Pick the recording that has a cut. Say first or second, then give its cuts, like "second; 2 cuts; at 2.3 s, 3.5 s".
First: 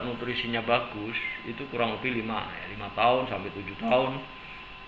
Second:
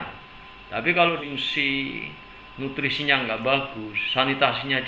second; 1 cut; at 1.2 s